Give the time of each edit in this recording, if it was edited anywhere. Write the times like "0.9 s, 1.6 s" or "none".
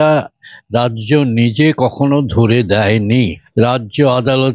3.4 s